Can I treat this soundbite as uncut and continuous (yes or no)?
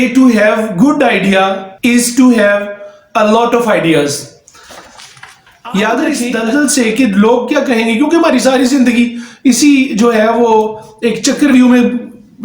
no